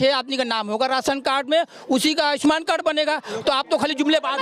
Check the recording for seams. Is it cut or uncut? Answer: uncut